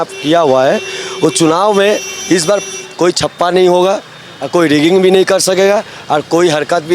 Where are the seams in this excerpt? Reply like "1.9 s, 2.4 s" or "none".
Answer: none

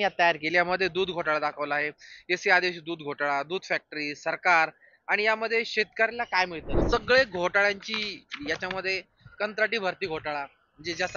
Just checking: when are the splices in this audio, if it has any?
6.7 s

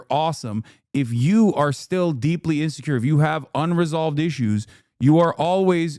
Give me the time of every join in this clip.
none

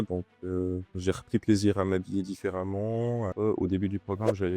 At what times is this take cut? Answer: 3.3 s

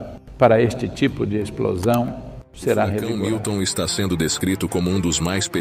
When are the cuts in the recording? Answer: 3.2 s

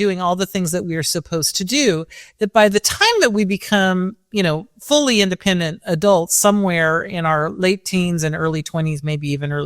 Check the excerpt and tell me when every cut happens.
none

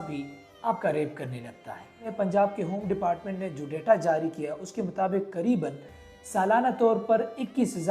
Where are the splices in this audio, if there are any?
2.1 s

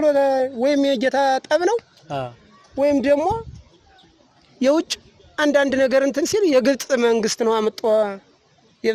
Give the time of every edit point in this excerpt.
none

